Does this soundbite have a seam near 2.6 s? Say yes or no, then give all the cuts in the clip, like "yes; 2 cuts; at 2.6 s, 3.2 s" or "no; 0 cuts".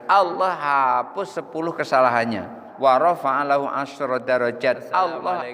yes; 1 cut; at 2.6 s